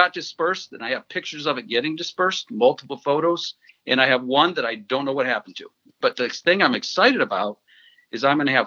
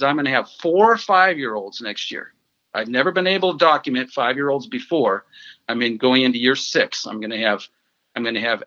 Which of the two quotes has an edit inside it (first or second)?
first